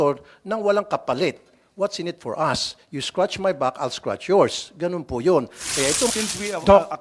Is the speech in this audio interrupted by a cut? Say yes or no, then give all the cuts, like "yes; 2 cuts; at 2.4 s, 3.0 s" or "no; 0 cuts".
yes; 1 cut; at 6.1 s